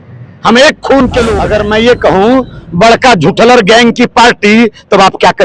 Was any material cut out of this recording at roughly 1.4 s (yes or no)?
yes